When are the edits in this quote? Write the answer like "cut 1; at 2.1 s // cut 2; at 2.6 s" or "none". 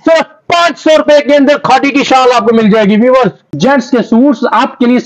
cut 1; at 3.5 s